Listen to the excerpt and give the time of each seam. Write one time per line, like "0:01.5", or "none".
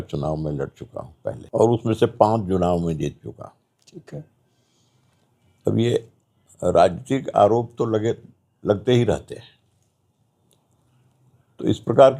0:01.4